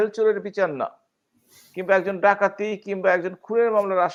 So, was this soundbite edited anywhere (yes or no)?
no